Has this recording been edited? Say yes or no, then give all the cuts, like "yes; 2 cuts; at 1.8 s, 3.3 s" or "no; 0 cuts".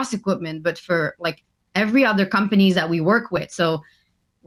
no; 0 cuts